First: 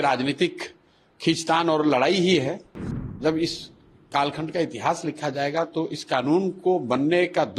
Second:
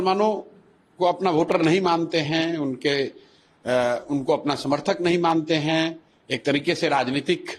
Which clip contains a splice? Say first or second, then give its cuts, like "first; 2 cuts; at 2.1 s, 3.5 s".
first; 1 cut; at 3.1 s